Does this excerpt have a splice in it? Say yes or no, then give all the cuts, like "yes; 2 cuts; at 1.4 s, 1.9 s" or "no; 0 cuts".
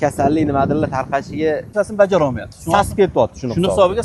yes; 1 cut; at 1.7 s